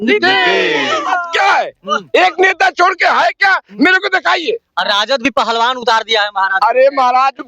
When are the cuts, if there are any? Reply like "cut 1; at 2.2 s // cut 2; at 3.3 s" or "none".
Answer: cut 1; at 1.2 s